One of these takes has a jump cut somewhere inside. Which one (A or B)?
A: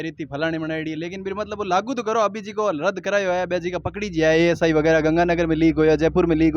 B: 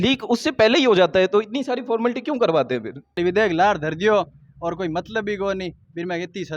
B